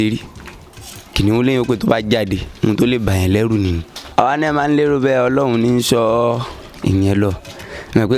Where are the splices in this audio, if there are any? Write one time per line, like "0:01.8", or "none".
0:04.0